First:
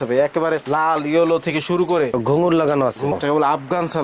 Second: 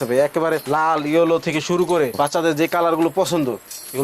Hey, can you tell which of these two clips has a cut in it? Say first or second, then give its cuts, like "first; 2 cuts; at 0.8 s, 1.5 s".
first; 2 cuts; at 2.1 s, 3.1 s